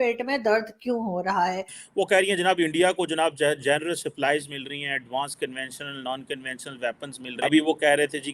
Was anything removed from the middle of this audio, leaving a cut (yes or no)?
yes